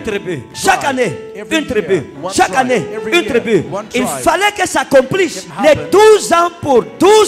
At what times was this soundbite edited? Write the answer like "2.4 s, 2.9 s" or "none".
none